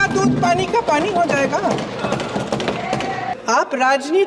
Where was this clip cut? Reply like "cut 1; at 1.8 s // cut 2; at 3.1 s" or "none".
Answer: cut 1; at 3.3 s